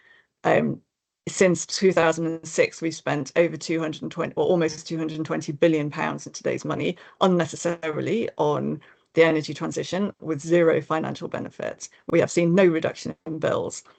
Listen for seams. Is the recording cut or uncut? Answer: uncut